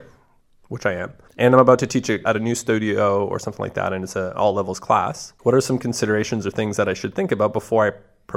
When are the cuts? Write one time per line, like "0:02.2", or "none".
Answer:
0:01.2
0:02.2
0:05.2